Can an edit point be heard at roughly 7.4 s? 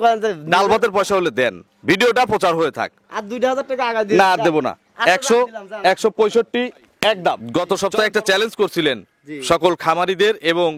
yes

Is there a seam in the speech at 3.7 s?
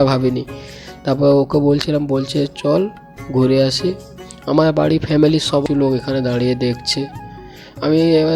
no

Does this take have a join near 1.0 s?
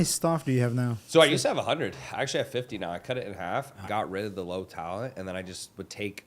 yes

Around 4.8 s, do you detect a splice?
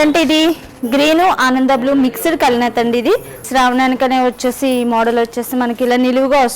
no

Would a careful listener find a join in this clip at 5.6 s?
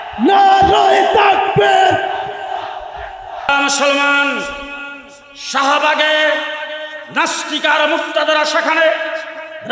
no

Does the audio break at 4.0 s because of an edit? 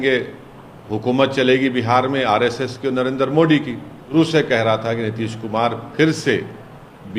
yes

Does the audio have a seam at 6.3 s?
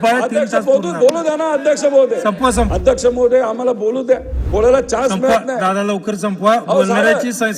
no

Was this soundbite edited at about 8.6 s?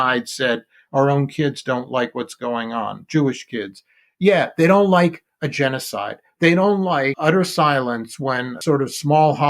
yes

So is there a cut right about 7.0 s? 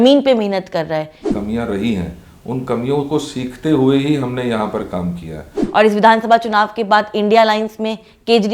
no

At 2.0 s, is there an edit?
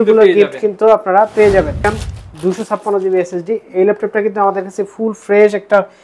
yes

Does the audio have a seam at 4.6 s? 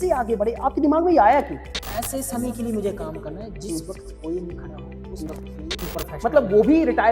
no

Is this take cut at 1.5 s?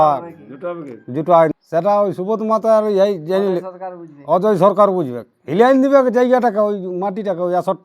yes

